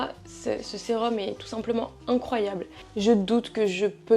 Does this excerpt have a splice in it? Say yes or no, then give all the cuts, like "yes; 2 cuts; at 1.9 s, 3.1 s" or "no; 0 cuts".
yes; 1 cut; at 2.7 s